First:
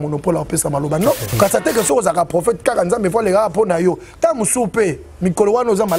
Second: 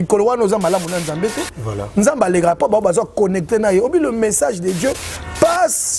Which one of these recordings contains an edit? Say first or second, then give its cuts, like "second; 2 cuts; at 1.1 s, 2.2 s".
first; 1 cut; at 1.3 s